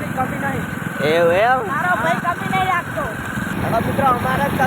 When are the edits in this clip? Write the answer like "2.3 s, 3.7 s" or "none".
1.7 s, 3.5 s